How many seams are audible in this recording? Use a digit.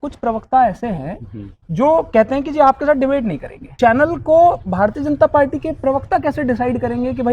1